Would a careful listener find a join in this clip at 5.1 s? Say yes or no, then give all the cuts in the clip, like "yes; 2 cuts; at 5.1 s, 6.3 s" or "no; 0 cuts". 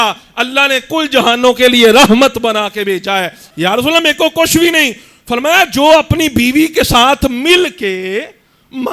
no; 1 cut; at 3.4 s